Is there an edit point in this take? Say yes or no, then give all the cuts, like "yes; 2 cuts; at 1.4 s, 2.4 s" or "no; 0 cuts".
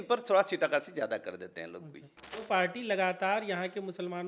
yes; 1 cut; at 2.4 s